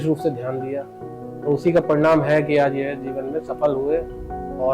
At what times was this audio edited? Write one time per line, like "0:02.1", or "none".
none